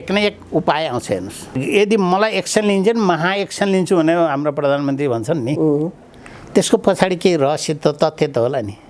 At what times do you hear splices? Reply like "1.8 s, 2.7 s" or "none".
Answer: 1.6 s